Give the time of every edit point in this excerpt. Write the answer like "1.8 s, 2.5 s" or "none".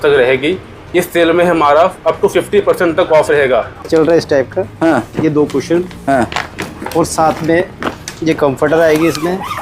3.9 s